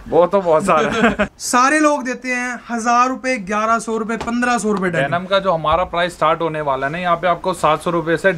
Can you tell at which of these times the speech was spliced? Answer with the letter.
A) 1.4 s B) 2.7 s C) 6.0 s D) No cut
A